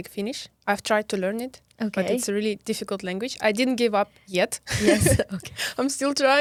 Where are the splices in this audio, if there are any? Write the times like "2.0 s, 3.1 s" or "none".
none